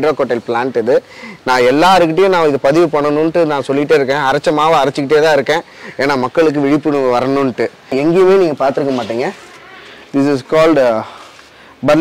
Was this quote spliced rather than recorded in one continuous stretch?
yes; 1 cut; at 7.9 s

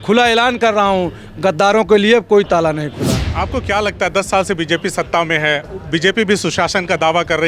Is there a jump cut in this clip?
yes; 1 cut; at 3.3 s

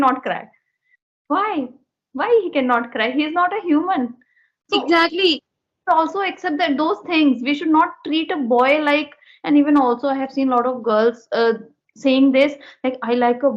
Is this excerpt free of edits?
yes; 0 cuts

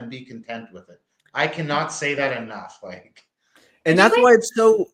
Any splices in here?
no; 0 cuts

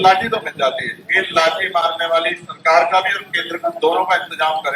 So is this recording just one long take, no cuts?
yes; 0 cuts

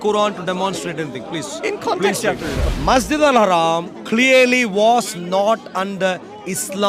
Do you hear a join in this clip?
yes; 1 cut; at 2.6 s

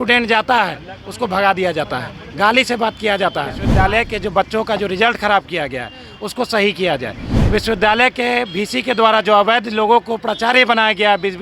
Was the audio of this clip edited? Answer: yes; 1 cut; at 3.6 s

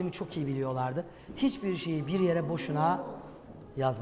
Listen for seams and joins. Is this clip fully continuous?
yes; 0 cuts

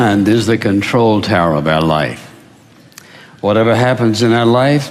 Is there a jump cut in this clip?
no; 0 cuts

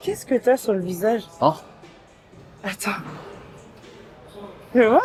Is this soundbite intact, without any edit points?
yes; 0 cuts

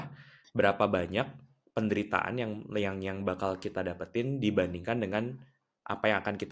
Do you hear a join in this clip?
no; 0 cuts

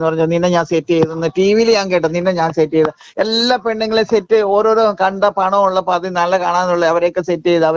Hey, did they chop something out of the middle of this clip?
no; 0 cuts

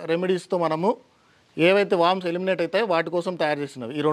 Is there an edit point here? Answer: no; 0 cuts

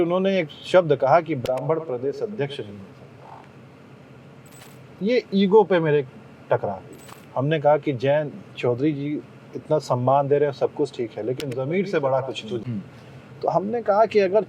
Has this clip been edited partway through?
yes; 2 cuts; at 6.9 s, 12.6 s

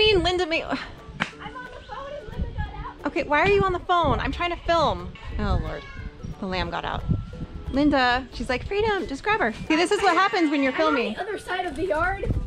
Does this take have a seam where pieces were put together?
yes; 4 cuts; at 5.2 s, 7.5 s, 8.3 s, 9.6 s

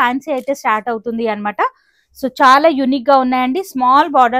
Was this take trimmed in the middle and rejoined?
no; 0 cuts

